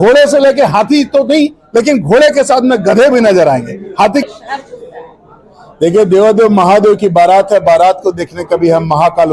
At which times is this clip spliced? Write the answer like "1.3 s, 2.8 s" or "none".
4.2 s